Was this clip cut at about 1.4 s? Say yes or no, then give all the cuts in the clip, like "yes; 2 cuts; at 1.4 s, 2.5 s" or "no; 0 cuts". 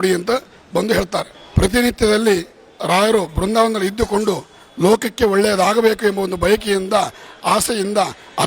yes; 1 cut; at 1.4 s